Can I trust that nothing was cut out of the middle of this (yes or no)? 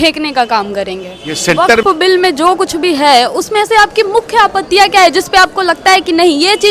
no